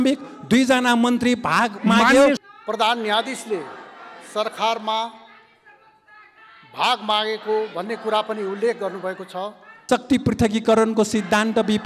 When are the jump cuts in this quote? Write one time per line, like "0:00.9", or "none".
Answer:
0:02.4
0:09.7